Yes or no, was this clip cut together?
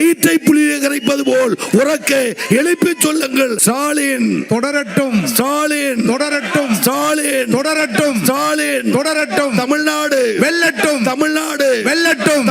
yes